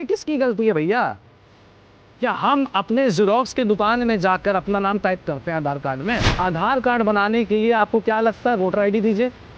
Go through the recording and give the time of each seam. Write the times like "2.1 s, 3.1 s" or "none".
6.3 s